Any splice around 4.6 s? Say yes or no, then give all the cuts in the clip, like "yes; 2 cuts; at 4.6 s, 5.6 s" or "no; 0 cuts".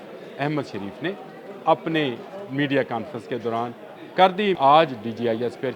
yes; 1 cut; at 4.6 s